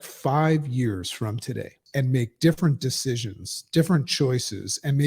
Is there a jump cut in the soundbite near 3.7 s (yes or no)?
no